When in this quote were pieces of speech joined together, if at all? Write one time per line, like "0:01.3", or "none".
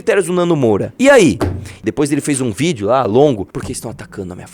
0:00.9
0:01.8
0:03.5